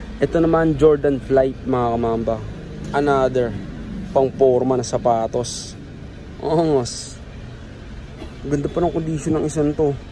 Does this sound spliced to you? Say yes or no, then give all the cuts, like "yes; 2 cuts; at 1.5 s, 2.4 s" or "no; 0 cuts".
no; 0 cuts